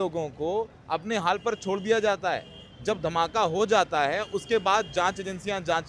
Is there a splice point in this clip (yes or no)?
no